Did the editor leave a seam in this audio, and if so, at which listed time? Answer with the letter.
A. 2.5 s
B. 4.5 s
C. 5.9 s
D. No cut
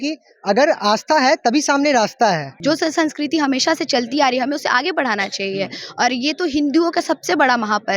A